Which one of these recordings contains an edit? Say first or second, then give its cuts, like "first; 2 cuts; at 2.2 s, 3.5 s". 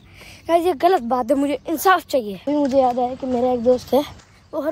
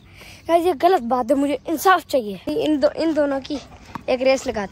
second; 1 cut; at 2.4 s